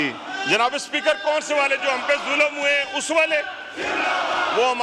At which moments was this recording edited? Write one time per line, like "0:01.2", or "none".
none